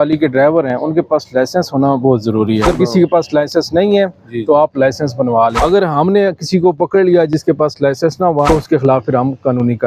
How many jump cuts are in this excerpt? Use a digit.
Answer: 3